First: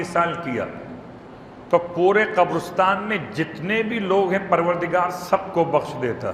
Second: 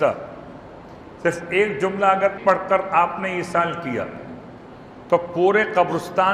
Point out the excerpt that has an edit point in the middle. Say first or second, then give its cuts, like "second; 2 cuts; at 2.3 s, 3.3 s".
second; 1 cut; at 2.4 s